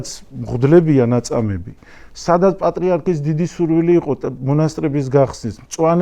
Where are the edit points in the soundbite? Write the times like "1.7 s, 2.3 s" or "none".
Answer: none